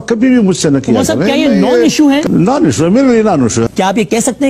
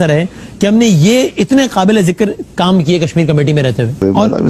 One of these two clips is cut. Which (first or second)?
first